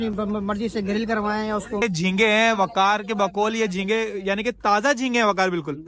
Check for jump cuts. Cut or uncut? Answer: cut